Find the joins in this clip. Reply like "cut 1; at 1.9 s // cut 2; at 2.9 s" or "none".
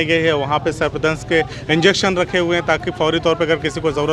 none